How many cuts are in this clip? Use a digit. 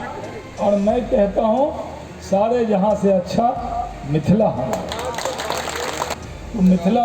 1